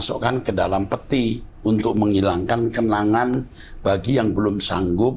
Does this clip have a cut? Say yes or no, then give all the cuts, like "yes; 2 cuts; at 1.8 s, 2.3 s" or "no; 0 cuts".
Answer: no; 0 cuts